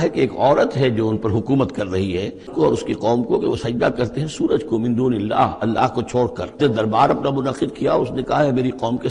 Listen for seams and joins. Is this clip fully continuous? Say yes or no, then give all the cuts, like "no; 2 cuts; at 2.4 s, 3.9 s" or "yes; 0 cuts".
no; 2 cuts; at 2.5 s, 6.5 s